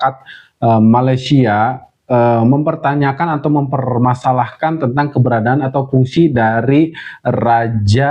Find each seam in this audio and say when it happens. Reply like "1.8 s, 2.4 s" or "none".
none